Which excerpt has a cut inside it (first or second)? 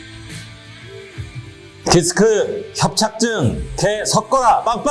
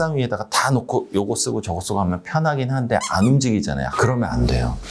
second